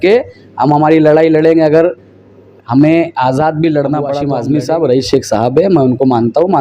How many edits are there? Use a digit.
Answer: 1